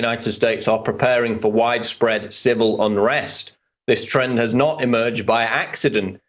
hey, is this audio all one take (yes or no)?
yes